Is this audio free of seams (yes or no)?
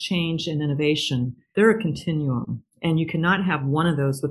no